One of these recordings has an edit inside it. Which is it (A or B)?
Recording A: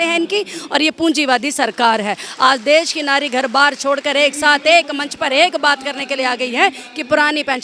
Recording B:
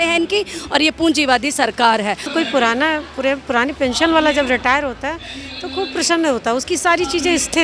B